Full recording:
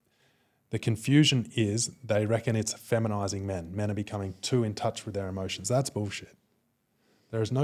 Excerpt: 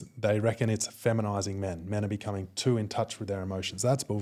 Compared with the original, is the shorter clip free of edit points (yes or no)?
yes